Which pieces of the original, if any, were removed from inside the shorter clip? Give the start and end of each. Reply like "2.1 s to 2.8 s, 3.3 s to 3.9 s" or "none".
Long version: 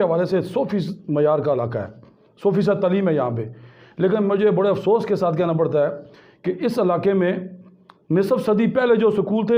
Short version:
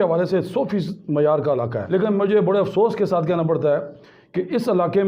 1.8 s to 3.9 s